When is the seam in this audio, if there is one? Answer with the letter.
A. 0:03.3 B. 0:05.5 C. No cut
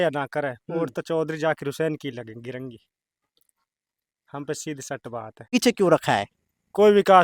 B